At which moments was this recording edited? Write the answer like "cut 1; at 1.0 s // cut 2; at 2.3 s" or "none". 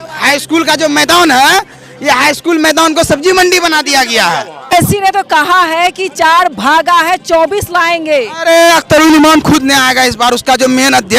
cut 1; at 4.7 s

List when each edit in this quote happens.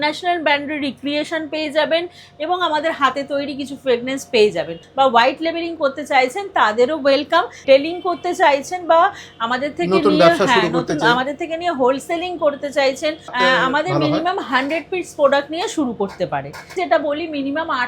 cut 1; at 4.8 s // cut 2; at 7.6 s // cut 3; at 13.3 s // cut 4; at 16.7 s

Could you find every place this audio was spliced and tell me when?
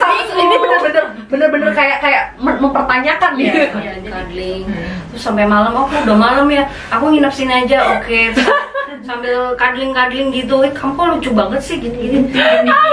cut 1; at 3.9 s

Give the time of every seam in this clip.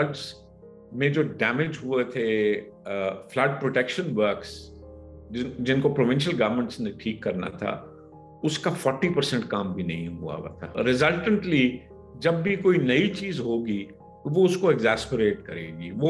cut 1; at 10.7 s

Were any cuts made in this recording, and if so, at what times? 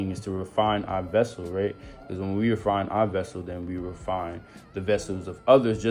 none

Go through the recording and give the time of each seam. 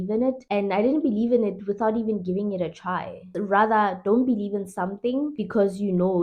none

